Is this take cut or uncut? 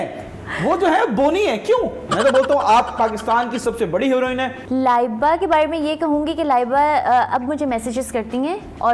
cut